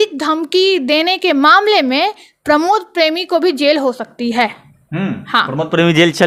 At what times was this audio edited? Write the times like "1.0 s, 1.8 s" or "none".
none